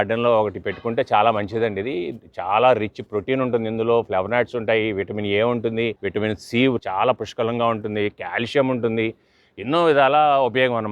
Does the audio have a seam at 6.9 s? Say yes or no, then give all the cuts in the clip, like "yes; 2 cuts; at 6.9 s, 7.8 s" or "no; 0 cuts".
yes; 2 cuts; at 6.0 s, 6.9 s